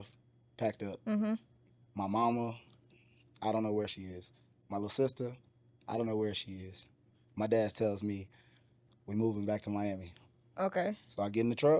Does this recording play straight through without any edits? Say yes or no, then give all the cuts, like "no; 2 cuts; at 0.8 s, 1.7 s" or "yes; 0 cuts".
yes; 0 cuts